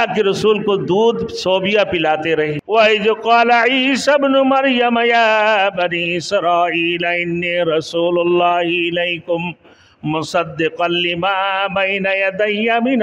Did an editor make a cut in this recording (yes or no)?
yes